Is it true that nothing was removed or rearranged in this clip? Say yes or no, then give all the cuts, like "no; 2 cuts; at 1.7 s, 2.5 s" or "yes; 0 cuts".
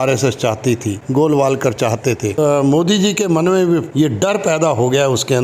no; 3 cuts; at 1.0 s, 2.4 s, 3.9 s